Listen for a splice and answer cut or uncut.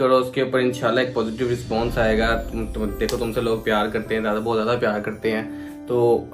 uncut